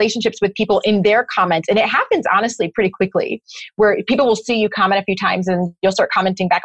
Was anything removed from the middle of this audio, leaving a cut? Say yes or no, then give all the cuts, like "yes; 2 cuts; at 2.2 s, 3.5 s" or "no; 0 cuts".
no; 0 cuts